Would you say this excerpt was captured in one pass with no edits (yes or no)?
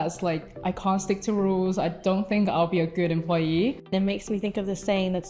no